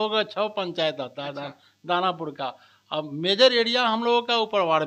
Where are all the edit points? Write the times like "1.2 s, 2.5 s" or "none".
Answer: none